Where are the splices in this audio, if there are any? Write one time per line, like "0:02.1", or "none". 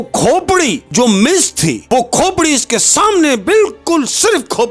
0:00.8
0:01.8